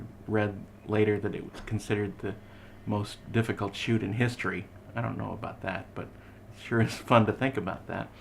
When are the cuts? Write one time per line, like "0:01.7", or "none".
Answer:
none